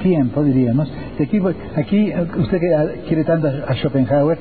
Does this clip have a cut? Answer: no; 0 cuts

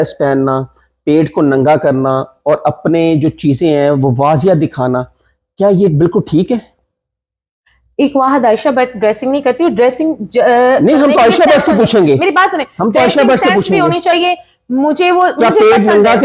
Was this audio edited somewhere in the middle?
no; 0 cuts

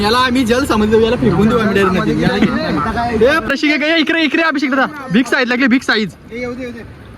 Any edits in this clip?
yes; 1 cut; at 3.4 s

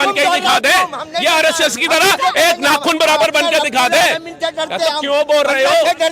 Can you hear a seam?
no; 0 cuts

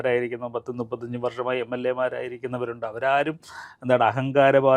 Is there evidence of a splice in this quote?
no; 0 cuts

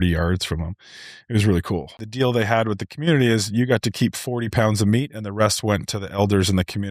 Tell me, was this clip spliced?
yes; 1 cut; at 2.0 s

